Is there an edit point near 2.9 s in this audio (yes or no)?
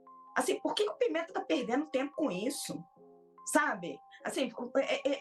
no